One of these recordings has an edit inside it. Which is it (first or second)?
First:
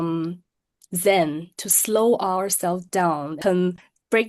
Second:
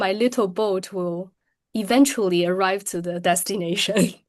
first